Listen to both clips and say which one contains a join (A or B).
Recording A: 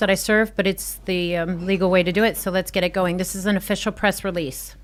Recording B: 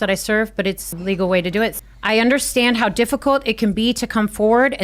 B